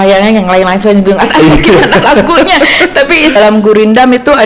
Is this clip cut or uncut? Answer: cut